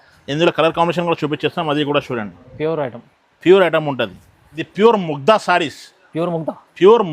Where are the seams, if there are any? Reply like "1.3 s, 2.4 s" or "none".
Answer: 4.6 s